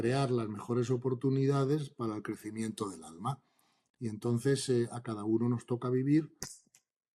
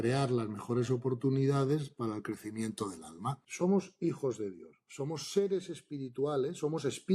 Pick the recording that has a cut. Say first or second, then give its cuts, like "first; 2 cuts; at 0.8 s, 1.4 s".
second; 1 cut; at 3.4 s